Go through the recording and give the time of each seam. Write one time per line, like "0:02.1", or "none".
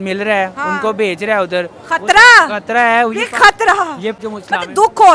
none